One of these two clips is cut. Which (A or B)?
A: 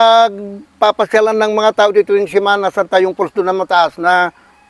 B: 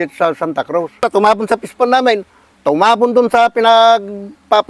B